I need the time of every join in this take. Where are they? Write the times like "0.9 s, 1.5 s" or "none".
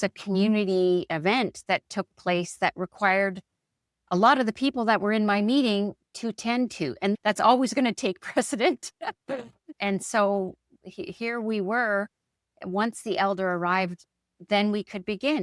7.2 s